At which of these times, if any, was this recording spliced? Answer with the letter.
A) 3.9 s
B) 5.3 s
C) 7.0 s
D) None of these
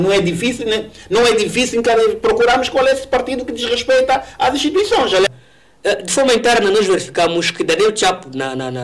B